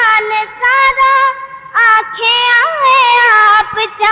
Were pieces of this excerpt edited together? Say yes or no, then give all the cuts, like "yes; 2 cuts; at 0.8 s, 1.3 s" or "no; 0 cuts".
no; 0 cuts